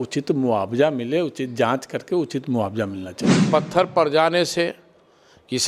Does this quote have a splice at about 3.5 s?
yes; 1 cut; at 3.5 s

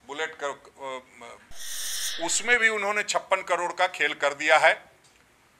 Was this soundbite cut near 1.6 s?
yes; 1 cut; at 1.6 s

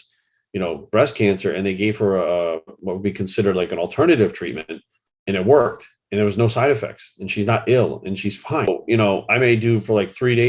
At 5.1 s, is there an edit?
no; 1 cut; at 8.7 s

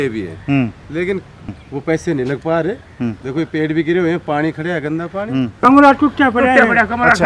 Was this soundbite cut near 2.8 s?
no; 2 cuts; at 1.5 s, 5.5 s

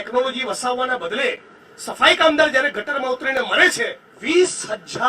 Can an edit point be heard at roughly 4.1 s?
yes; 1 cut; at 4.1 s

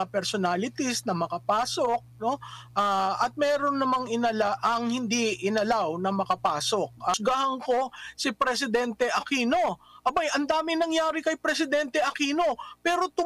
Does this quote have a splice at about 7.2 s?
yes; 1 cut; at 7.2 s

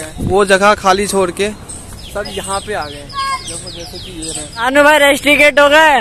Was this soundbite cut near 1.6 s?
no; 1 cut; at 4.4 s

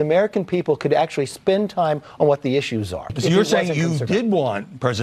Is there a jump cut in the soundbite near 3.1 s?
yes; 1 cut; at 3.1 s

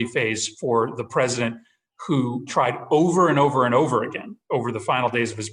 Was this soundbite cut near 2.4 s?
yes; 1 cut; at 2.4 s

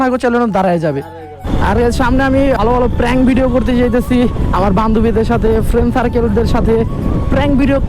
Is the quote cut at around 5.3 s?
no; 2 cuts; at 1.4 s, 2.6 s

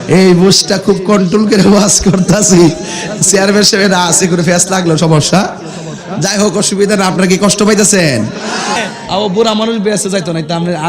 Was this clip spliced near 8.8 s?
yes; 1 cut; at 8.8 s

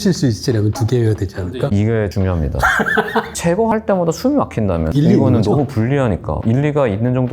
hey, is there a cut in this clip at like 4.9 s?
yes; 4 cuts; at 1.8 s, 3.3 s, 4.9 s, 6.3 s

